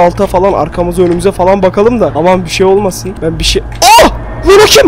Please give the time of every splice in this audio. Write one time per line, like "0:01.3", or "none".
0:02.1
0:03.1